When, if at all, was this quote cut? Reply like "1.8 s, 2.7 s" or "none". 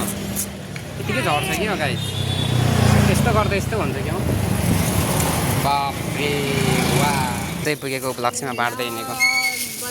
7.6 s